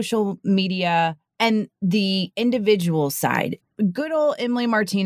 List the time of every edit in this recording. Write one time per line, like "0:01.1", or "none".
0:01.6
0:03.6